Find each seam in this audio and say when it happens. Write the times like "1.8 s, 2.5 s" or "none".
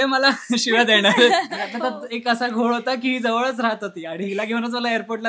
1.6 s